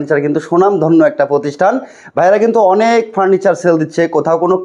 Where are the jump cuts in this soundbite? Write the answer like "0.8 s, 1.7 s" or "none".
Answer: none